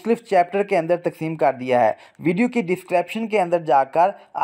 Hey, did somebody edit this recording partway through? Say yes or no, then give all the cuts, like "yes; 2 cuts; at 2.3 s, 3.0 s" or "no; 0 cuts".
no; 0 cuts